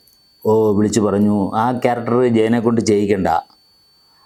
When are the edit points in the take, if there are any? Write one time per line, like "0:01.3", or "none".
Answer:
none